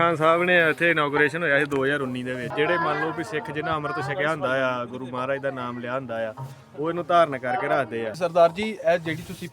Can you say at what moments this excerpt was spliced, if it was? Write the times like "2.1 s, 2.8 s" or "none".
2.5 s, 8.1 s